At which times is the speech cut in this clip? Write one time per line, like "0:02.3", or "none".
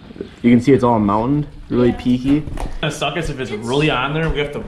0:02.9

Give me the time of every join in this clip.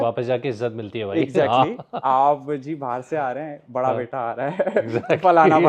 none

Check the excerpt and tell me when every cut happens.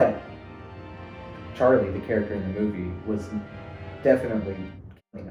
none

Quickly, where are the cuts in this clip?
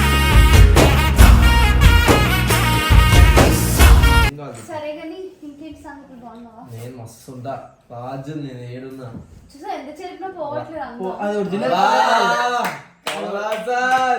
0:04.4

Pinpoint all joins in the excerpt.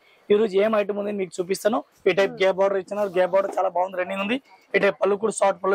0:01.9

